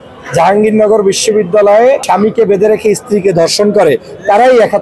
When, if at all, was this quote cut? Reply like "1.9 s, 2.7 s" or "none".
2.0 s